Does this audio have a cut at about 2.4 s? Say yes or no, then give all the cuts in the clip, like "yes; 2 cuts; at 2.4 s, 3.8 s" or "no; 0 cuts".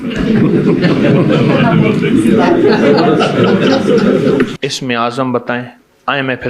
no; 1 cut; at 4.6 s